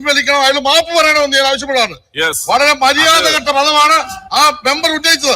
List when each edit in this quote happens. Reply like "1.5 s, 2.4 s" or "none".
none